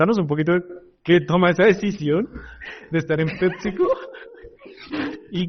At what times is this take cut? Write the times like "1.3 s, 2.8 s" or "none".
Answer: none